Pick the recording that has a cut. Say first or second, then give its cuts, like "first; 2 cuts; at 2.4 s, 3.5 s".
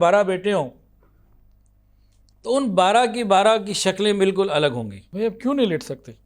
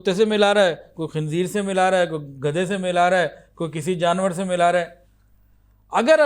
first; 1 cut; at 5.0 s